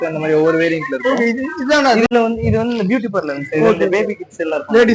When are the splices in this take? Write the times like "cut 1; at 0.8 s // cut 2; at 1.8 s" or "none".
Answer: cut 1; at 2.1 s